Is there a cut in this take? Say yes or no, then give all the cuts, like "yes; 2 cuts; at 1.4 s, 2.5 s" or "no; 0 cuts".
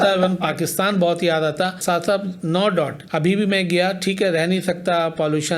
yes; 2 cuts; at 1.8 s, 3.0 s